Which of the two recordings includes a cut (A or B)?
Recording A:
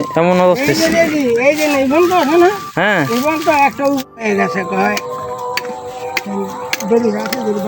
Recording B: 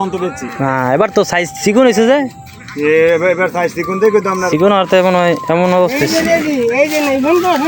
A